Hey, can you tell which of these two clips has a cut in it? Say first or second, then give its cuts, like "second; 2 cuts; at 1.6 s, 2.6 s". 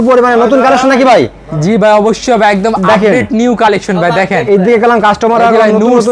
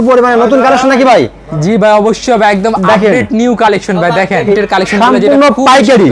second; 1 cut; at 4.6 s